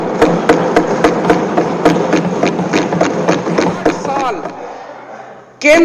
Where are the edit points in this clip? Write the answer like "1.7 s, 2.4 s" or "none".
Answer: 4.2 s